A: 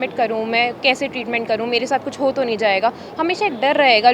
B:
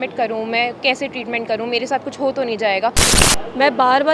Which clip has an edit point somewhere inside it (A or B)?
B